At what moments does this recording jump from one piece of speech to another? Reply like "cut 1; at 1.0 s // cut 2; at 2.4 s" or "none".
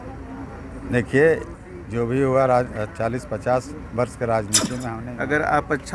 cut 1; at 5.0 s